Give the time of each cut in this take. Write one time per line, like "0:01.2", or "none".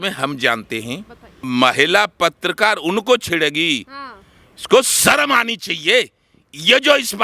0:01.4